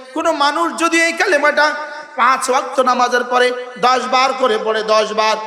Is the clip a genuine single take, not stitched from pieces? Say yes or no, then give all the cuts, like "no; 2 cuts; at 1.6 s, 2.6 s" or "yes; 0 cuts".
yes; 0 cuts